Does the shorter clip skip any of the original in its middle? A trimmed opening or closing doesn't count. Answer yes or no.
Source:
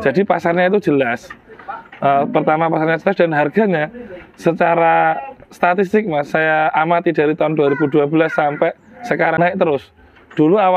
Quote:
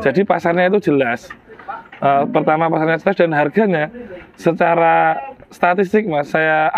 no